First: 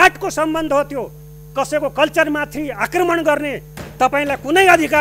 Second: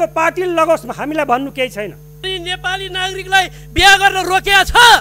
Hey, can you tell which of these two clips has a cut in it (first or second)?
second